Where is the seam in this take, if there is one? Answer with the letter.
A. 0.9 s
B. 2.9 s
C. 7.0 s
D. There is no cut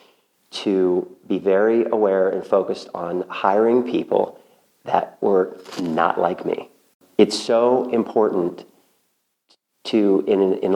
C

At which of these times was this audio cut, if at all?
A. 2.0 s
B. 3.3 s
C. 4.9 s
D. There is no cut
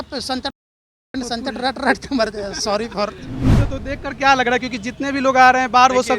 B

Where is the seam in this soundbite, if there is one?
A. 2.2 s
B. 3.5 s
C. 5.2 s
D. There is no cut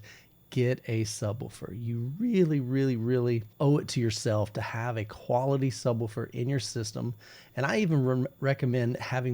B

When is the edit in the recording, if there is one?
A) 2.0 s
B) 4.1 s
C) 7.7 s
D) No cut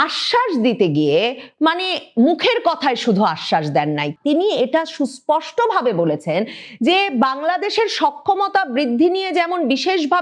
B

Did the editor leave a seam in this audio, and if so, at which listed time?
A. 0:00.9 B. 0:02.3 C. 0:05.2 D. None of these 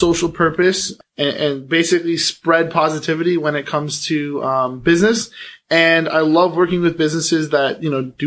A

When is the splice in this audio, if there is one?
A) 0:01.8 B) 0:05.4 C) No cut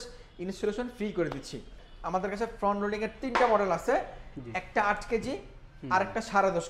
A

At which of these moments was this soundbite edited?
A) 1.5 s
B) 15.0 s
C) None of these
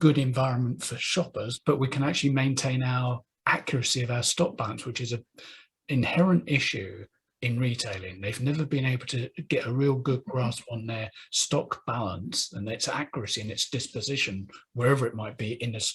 A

